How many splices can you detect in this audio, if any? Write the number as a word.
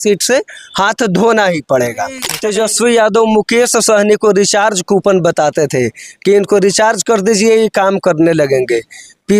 one